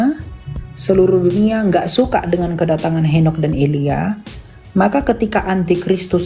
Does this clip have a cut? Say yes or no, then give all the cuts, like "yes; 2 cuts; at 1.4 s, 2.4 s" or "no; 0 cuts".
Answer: no; 0 cuts